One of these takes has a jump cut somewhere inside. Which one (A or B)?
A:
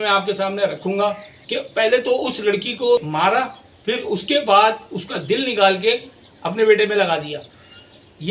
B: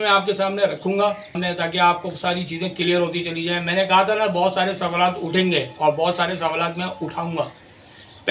A